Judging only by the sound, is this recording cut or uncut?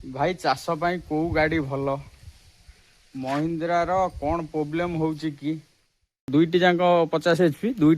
cut